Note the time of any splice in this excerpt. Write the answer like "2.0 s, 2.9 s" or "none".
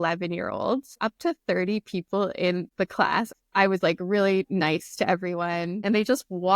0.9 s, 3.2 s